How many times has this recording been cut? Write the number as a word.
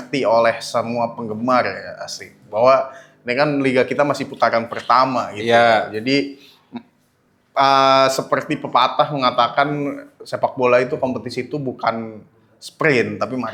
zero